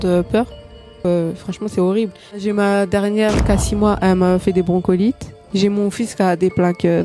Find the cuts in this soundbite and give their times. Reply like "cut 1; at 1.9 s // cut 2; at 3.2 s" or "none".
cut 1; at 1.0 s // cut 2; at 2.4 s